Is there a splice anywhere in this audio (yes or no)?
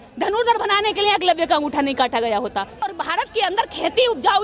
yes